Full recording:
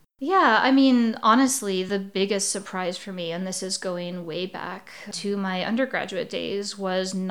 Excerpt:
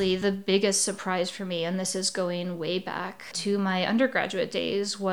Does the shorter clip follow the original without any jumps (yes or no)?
no